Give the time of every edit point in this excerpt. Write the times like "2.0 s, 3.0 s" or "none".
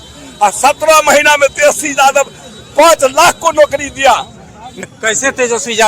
4.7 s